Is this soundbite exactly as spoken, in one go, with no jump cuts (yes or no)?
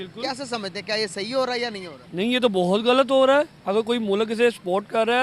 yes